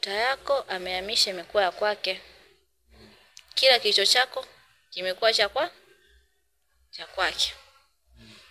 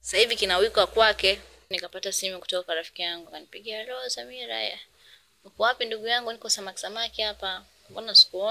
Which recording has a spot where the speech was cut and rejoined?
second; 1 cut; at 1.7 s

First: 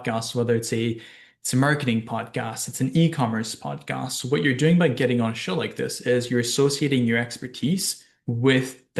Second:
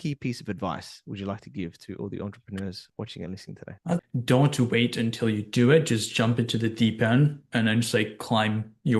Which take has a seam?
second; 1 cut; at 4.1 s

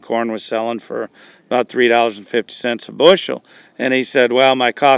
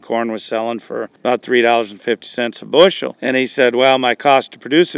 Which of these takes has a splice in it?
second; 2 cuts; at 1.1 s, 3.1 s

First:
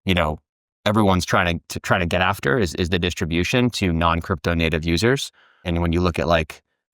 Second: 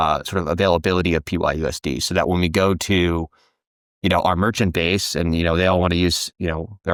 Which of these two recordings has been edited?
first; 1 cut; at 5.6 s

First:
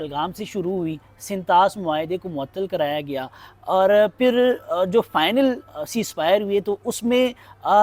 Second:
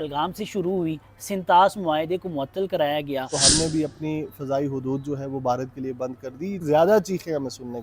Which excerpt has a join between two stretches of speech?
second; 2 cuts; at 3.4 s, 6.6 s

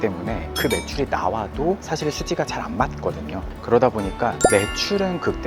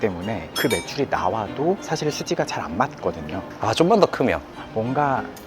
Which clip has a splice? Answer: second; 2 cuts; at 3.5 s, 4.5 s

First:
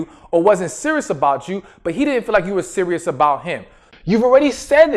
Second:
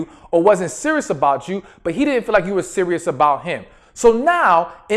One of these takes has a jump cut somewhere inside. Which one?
first; 1 cut; at 3.8 s

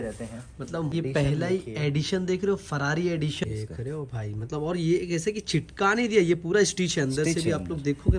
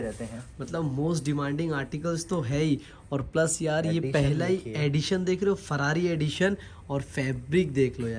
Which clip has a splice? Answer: first; 2 cuts; at 0.9 s, 3.4 s

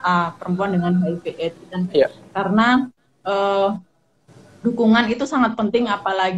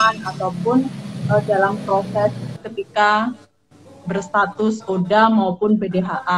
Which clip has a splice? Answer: second; 1 cut; at 2.5 s

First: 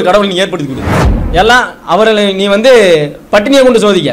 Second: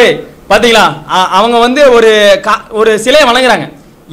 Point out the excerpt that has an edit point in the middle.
first; 1 cut; at 1.1 s

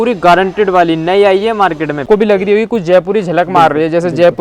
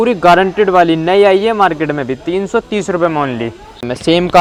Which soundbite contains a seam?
first; 1 cut; at 2.0 s

